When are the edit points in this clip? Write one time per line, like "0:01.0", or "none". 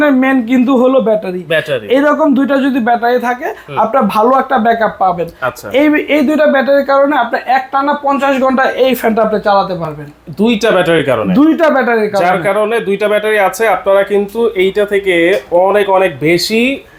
none